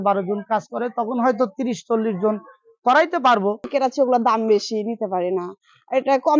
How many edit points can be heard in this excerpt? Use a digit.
1